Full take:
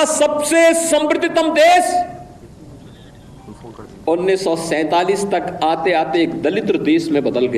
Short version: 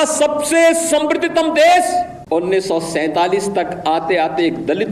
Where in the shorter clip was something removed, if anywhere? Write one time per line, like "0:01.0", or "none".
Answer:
0:02.2